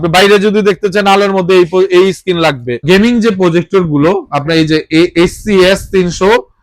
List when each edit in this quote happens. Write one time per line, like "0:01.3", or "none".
0:02.8

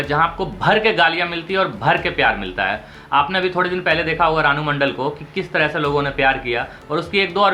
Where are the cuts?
none

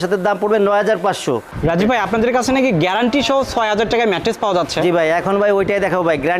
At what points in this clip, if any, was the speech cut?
0:01.5

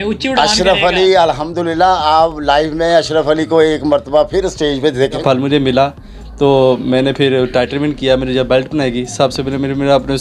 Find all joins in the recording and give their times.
0:05.2

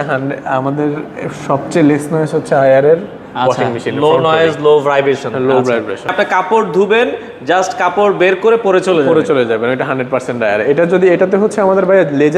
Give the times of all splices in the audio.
0:06.1

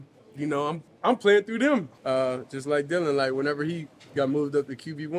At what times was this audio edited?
0:00.9
0:01.9

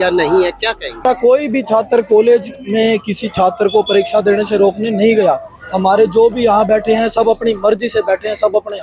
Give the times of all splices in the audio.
0:01.0

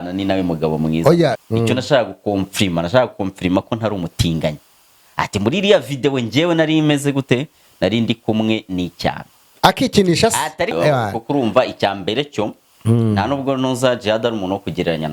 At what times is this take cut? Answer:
0:01.4
0:10.7

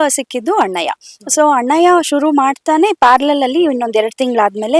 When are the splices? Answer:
none

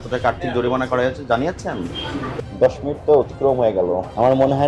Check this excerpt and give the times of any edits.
0:02.4

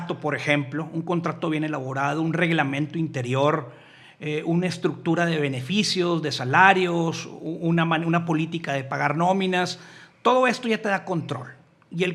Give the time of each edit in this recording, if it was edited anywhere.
none

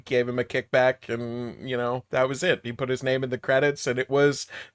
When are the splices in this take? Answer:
none

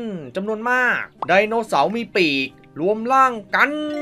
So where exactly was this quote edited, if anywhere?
0:01.1

